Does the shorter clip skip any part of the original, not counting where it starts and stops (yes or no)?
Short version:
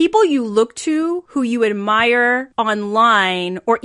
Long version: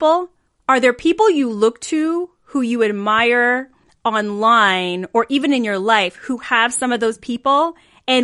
yes